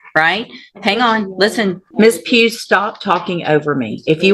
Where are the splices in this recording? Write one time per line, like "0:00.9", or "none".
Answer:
0:01.8